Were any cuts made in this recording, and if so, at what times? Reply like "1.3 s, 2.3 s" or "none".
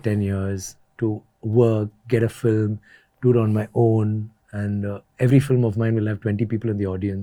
none